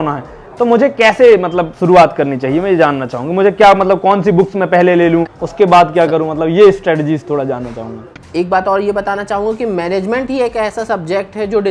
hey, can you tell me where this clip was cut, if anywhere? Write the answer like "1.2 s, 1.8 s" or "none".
5.4 s, 8.1 s